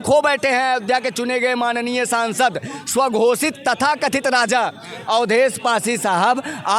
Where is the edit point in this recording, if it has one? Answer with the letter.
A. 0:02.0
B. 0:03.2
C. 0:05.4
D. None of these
D